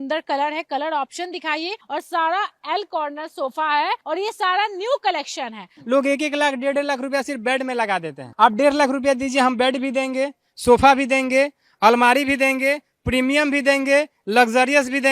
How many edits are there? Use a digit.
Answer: 3